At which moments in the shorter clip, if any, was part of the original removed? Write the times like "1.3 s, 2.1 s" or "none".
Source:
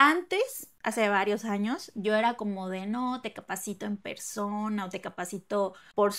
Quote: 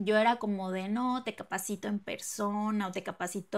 none